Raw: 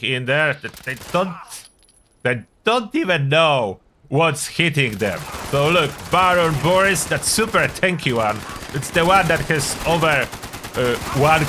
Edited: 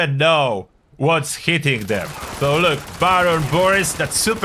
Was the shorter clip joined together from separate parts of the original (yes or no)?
no